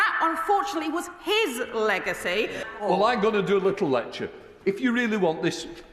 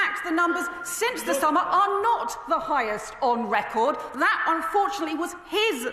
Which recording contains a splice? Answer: first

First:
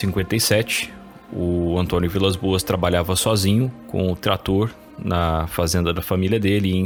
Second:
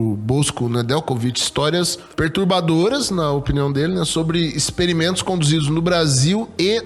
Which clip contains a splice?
second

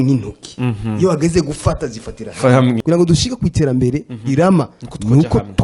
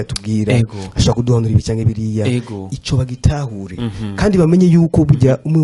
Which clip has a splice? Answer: first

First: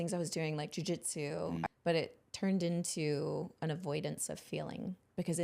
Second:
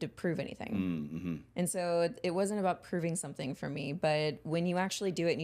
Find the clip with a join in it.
first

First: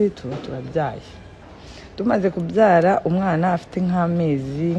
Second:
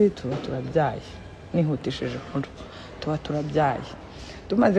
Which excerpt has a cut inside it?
first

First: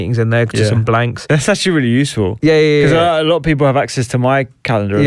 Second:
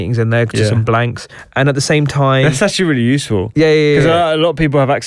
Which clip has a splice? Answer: first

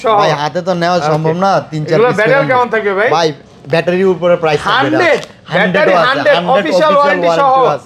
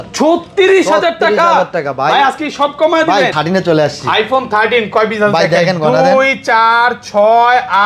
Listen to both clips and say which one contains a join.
second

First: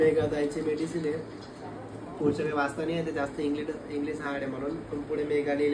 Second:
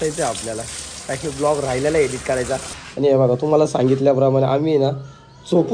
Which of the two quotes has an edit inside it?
second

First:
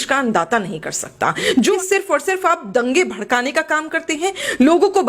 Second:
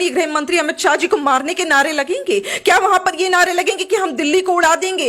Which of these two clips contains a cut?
first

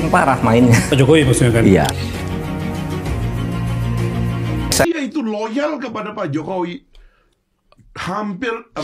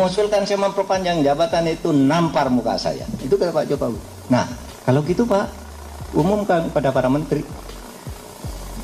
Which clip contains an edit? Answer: first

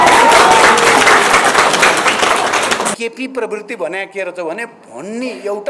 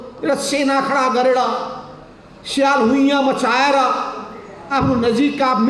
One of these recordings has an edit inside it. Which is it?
first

